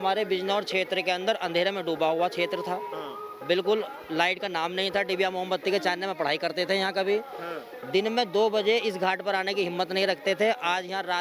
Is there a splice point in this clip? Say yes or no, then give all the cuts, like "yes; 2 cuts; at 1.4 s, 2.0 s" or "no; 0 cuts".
no; 0 cuts